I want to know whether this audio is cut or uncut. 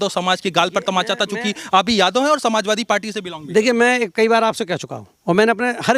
uncut